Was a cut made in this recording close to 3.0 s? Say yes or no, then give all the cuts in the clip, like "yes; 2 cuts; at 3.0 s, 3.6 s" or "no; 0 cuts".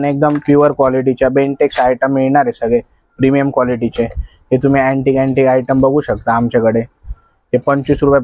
no; 0 cuts